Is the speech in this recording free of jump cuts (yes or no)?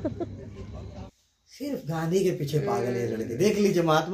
no